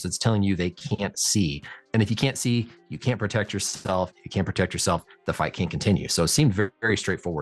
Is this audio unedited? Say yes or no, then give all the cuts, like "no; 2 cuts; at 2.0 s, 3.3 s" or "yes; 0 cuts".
yes; 0 cuts